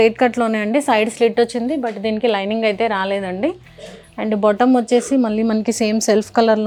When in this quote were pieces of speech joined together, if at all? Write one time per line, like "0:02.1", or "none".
none